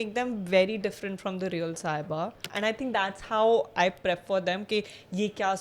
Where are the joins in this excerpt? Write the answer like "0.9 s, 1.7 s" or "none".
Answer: 2.4 s